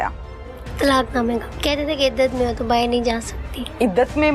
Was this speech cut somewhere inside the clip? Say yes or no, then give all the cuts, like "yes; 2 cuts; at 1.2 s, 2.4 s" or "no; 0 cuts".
yes; 1 cut; at 1.5 s